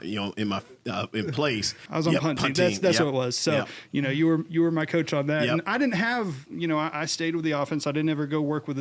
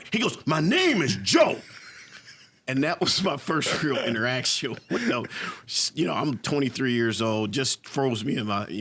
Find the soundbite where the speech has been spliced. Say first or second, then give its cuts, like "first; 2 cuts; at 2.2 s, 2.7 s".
first; 1 cut; at 1.8 s